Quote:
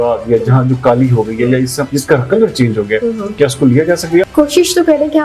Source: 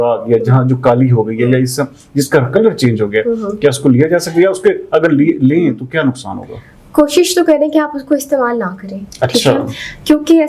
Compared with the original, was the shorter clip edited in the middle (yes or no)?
yes